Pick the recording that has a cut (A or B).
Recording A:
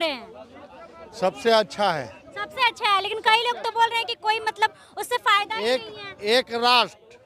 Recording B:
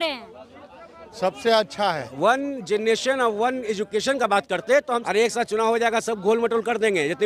B